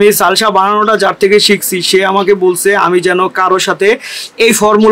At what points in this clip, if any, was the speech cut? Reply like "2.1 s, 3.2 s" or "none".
none